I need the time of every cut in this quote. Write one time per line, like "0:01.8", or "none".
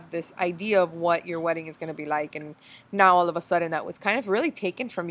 none